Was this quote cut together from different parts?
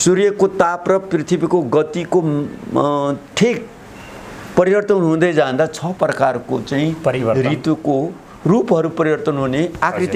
no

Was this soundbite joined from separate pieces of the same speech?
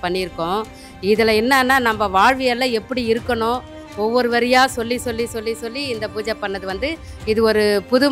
no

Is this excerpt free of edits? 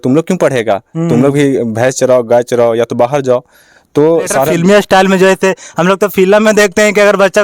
no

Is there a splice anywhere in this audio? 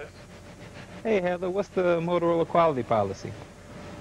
no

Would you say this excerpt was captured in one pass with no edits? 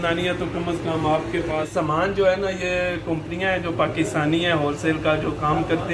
no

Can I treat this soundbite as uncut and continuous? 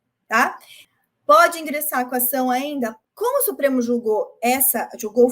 no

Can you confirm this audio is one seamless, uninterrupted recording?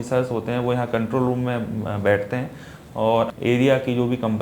no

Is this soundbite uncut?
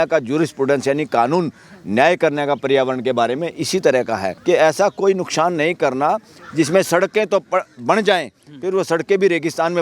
no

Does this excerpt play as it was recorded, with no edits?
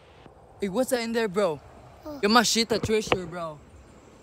no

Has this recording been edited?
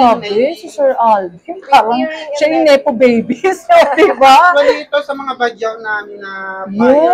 no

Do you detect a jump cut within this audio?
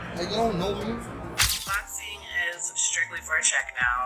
yes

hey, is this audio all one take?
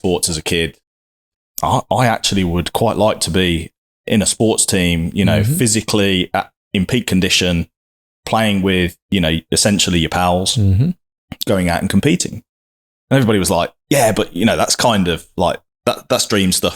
no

